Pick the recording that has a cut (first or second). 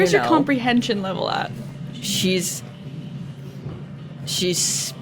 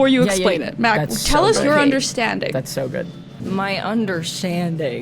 second